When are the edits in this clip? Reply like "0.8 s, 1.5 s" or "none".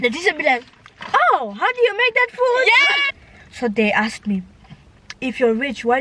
3.1 s